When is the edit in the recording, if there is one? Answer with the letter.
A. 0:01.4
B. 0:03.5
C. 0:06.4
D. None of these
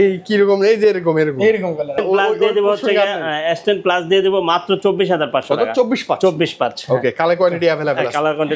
D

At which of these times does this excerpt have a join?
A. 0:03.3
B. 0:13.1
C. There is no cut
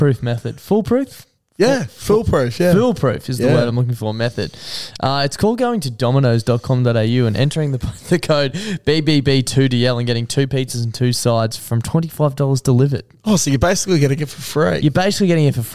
C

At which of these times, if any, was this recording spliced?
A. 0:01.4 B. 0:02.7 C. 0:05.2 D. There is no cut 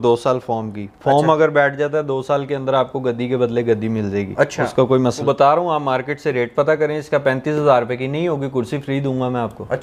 C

